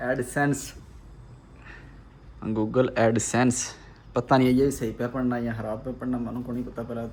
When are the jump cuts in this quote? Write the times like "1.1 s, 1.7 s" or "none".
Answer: none